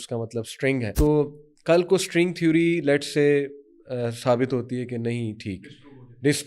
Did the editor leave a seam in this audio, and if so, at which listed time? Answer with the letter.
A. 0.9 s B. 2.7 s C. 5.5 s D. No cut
A